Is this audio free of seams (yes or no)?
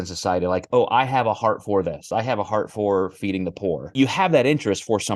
no